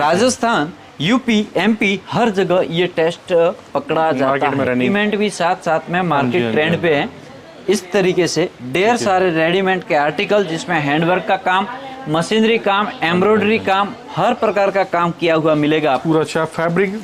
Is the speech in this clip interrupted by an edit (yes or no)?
yes